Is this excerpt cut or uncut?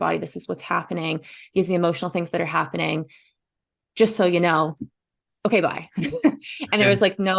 uncut